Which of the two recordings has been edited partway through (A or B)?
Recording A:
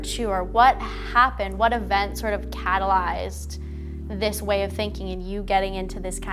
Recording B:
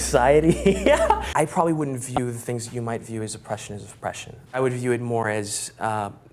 B